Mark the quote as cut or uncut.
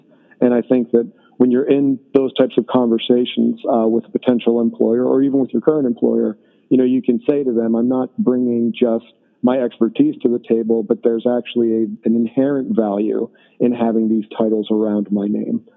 uncut